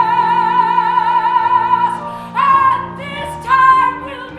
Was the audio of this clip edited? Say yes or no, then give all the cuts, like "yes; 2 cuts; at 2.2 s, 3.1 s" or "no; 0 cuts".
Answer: yes; 1 cut; at 2.3 s